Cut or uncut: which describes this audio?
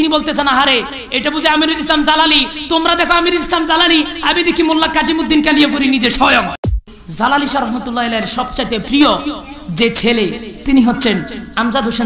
cut